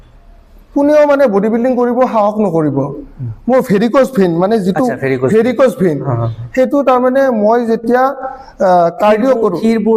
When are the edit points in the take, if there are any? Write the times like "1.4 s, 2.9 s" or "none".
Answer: none